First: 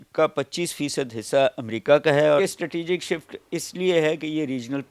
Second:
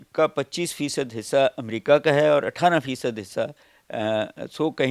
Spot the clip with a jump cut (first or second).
first